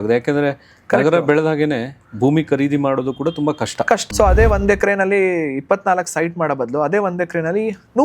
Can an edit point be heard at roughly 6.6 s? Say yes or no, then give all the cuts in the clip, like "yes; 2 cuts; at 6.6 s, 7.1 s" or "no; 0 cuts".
no; 1 cut; at 4.0 s